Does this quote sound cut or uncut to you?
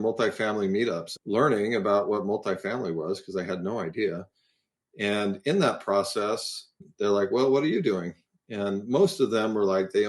cut